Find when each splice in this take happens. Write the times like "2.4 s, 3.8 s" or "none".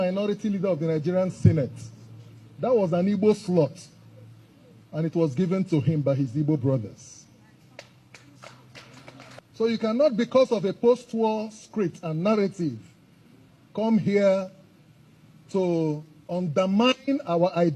9.4 s

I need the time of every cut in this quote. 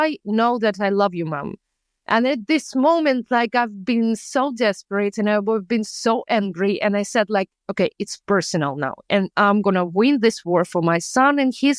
none

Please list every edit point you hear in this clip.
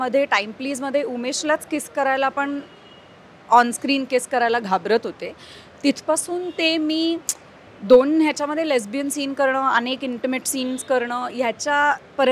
none

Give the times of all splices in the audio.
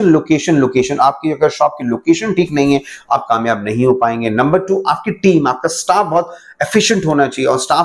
none

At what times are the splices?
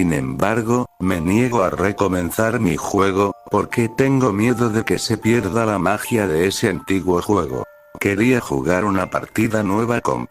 0.9 s

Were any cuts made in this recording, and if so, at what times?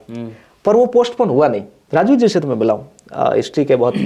1.7 s

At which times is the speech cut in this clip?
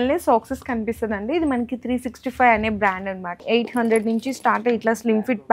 3.3 s

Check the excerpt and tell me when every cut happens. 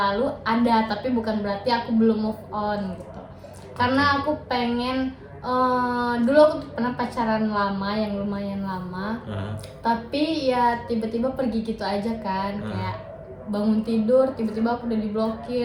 none

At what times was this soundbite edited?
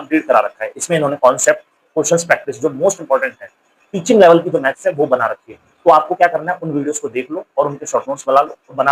none

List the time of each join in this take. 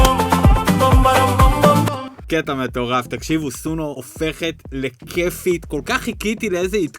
2.2 s, 4.0 s

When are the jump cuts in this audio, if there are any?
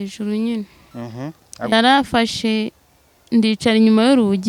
1.7 s

